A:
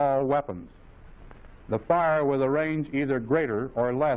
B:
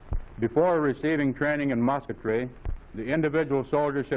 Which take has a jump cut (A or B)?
A